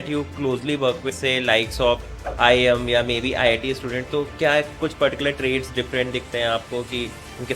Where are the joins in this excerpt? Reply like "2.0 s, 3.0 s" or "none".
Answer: 1.1 s